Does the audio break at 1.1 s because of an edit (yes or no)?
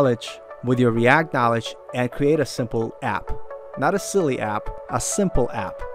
no